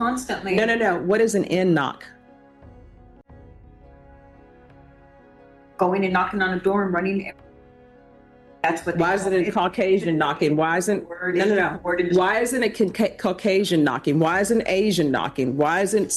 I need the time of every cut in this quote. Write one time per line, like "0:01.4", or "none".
none